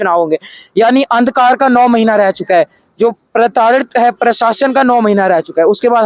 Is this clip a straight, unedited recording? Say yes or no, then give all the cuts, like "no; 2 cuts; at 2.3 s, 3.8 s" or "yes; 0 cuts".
yes; 0 cuts